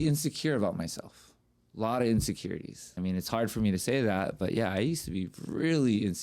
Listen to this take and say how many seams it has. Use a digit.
1